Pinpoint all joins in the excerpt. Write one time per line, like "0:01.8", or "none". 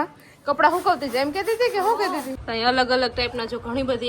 0:02.4